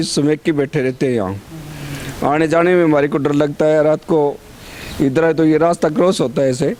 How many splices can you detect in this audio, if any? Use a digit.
0